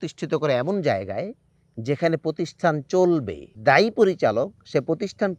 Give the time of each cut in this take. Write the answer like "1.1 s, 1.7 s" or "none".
3.5 s